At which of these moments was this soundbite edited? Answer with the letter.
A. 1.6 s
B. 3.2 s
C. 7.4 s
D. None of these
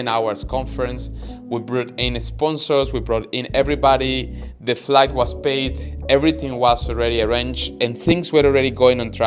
D